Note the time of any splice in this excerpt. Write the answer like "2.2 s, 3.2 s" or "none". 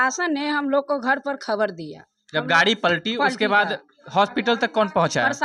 none